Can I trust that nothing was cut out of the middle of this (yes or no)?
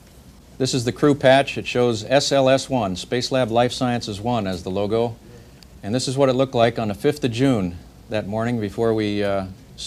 yes